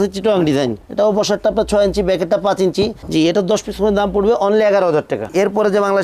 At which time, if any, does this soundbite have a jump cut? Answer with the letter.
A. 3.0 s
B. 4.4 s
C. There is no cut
C